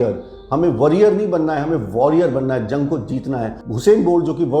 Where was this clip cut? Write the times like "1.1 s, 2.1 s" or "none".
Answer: 3.6 s